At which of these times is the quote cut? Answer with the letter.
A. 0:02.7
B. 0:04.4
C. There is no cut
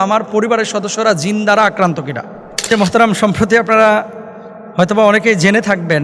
A